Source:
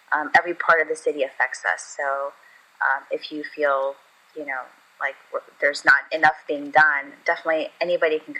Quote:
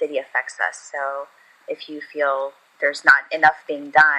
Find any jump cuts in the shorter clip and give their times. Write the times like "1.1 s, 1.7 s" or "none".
1.6 s, 2.7 s

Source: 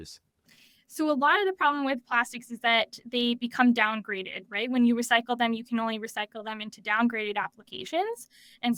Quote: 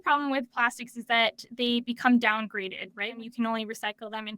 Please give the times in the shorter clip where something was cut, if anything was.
3.2 s

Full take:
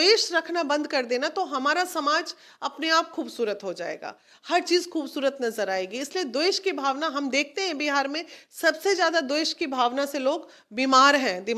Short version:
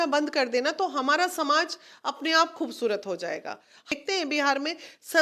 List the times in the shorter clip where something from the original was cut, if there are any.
3.9 s

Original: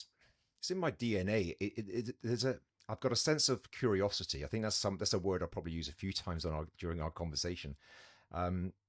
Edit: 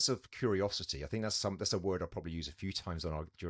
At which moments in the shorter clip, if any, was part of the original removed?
none

